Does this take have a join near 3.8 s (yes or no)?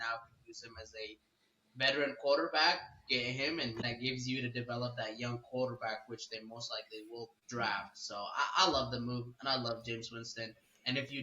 yes